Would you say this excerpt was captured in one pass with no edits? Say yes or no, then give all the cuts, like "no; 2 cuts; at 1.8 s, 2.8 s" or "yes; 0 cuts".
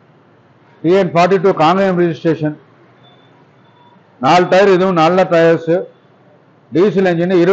yes; 0 cuts